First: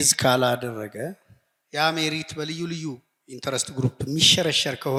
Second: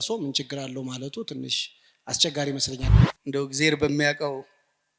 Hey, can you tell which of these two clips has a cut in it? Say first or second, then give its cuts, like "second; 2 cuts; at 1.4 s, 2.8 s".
second; 1 cut; at 2.8 s